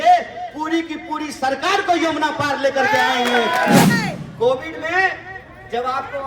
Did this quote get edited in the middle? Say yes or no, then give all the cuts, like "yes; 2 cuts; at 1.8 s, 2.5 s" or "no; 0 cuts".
yes; 1 cut; at 3.9 s